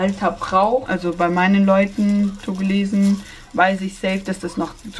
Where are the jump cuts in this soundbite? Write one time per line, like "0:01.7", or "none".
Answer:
0:00.9